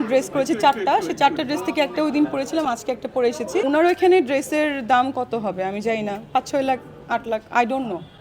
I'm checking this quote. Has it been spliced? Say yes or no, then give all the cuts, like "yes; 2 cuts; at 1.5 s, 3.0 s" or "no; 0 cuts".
yes; 1 cut; at 3.6 s